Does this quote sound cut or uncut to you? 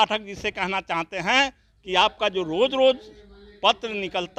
uncut